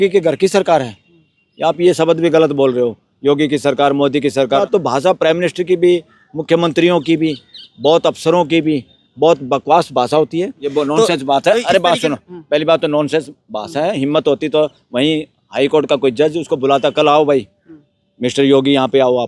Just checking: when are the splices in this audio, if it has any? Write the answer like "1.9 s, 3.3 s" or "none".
4.6 s, 10.6 s